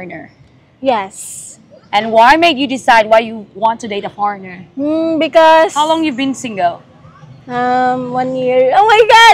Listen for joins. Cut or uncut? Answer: cut